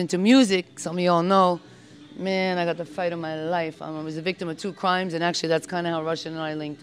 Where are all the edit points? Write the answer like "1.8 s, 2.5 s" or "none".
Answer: none